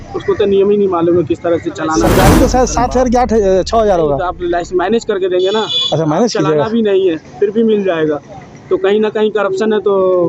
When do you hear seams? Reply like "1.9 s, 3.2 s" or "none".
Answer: 2.1 s